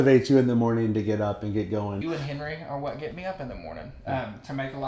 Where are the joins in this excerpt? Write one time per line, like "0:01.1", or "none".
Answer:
0:02.0

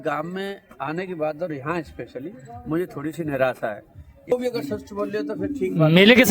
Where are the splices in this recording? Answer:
0:04.2

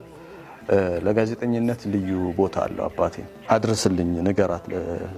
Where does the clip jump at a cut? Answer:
0:03.3

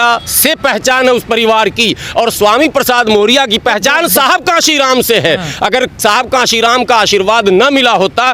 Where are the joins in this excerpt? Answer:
none

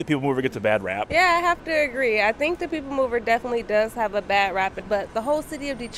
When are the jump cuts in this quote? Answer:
0:01.0
0:04.8

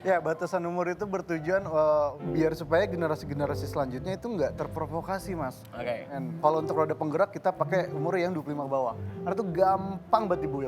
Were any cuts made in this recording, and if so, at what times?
0:02.2
0:06.1

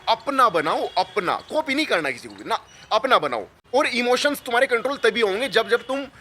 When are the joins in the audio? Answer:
none

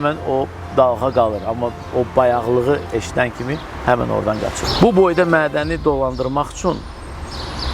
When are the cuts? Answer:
0:04.6

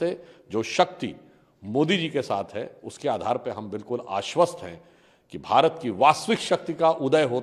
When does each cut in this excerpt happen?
none

